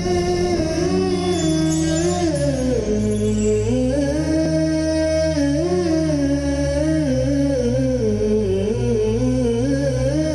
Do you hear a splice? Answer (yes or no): yes